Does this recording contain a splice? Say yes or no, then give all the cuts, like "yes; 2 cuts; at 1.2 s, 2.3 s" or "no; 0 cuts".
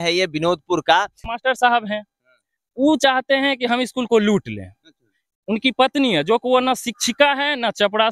yes; 1 cut; at 1.3 s